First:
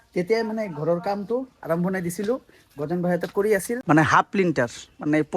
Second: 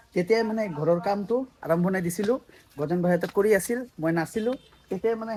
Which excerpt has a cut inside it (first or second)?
first